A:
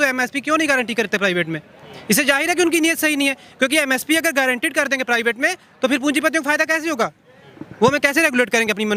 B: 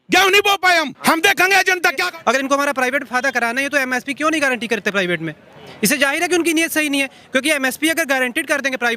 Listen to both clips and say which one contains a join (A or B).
B